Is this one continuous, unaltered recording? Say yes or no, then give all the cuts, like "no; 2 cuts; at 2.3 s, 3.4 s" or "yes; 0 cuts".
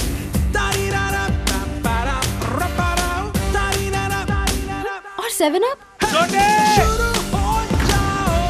yes; 0 cuts